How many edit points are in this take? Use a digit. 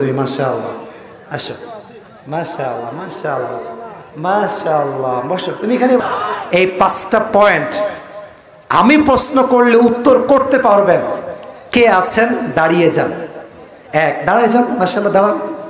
1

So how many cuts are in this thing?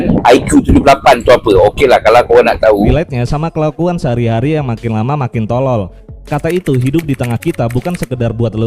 1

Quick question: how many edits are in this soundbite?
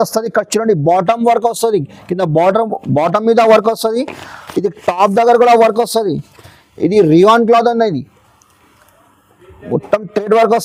0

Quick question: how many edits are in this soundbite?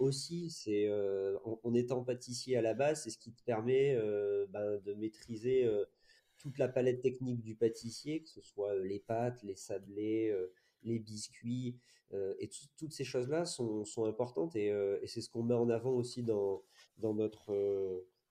0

